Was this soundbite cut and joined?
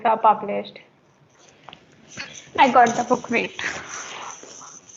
yes; 1 cut; at 1.5 s

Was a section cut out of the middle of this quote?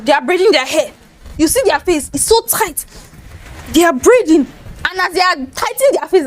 yes; 1 cut; at 1.2 s

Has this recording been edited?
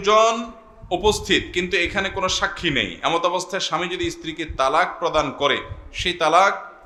no; 0 cuts

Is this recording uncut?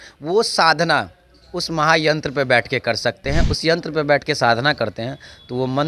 no; 1 cut; at 3.5 s

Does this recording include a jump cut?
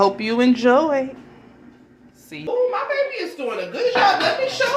yes; 1 cut; at 2.3 s

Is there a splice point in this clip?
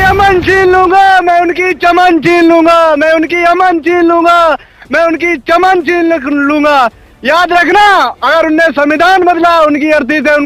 no; 0 cuts

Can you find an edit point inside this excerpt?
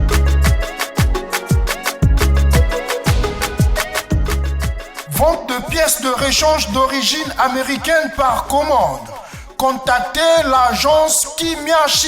no; 0 cuts

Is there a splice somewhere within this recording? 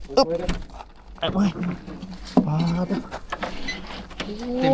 no; 0 cuts

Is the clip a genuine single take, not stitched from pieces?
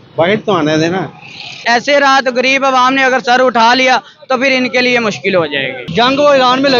no; 2 cuts; at 1.6 s, 5.8 s

